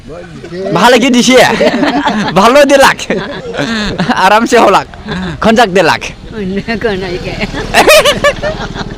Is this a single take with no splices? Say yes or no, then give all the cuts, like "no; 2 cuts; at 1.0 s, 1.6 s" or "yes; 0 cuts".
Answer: yes; 0 cuts